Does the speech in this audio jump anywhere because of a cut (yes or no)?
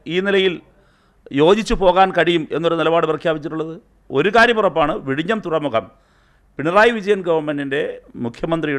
yes